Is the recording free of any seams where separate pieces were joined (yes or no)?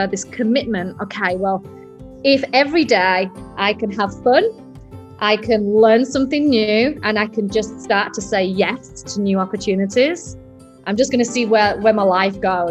yes